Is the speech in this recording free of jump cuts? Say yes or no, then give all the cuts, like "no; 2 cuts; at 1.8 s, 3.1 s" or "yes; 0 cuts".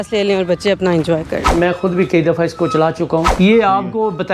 no; 2 cuts; at 1.5 s, 3.3 s